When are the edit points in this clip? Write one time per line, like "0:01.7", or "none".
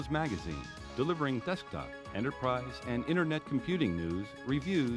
none